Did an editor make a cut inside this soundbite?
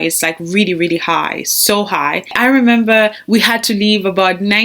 yes; 1 cut; at 2.3 s

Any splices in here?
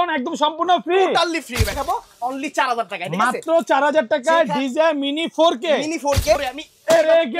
yes; 2 cuts; at 1.7 s, 6.4 s

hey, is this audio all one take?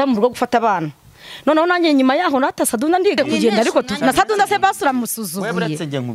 no; 1 cut; at 3.2 s

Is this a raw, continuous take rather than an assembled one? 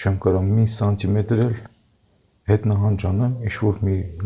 yes; 0 cuts

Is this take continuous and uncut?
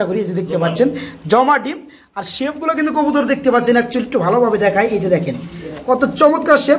yes; 0 cuts

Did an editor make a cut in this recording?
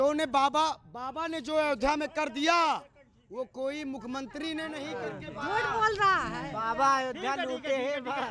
no; 0 cuts

